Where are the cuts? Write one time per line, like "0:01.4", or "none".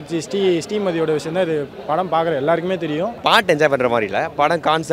0:03.2